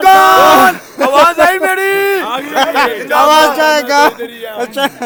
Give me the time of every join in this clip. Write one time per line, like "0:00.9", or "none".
none